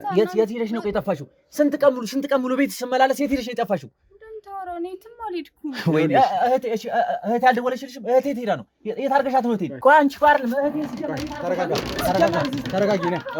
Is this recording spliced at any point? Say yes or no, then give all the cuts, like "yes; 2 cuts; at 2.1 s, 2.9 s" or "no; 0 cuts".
no; 0 cuts